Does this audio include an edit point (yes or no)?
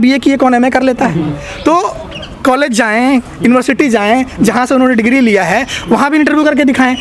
no